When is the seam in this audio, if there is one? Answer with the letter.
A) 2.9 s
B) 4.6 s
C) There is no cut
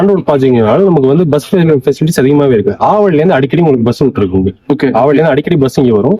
C